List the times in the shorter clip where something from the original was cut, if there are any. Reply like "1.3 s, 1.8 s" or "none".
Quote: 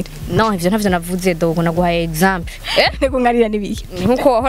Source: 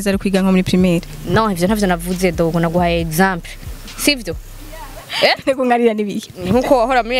2.5 s